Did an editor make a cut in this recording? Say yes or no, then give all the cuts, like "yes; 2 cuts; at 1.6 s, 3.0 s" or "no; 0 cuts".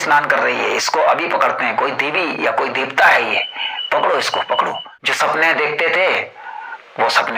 yes; 1 cut; at 4.9 s